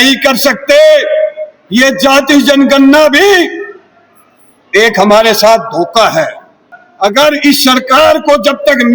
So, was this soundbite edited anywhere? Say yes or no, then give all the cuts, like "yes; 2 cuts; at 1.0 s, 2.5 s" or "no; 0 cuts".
yes; 1 cut; at 6.8 s